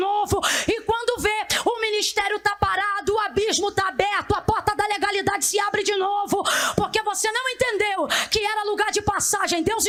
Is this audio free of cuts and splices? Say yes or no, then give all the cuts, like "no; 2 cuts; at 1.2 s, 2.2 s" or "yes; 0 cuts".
yes; 0 cuts